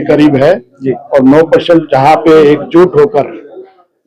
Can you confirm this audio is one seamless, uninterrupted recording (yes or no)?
yes